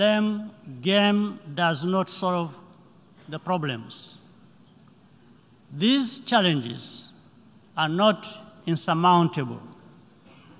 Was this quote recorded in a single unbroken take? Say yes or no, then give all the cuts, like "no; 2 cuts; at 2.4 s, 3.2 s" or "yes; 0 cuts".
yes; 0 cuts